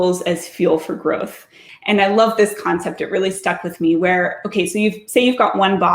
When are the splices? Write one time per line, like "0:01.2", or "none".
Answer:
0:01.7

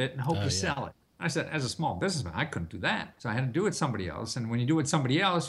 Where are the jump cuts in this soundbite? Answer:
0:01.0
0:03.1

